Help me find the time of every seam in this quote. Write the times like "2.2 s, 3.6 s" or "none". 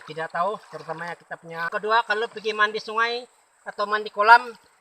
1.7 s